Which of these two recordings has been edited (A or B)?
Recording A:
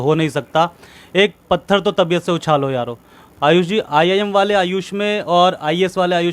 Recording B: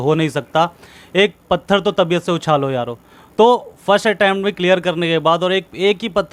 A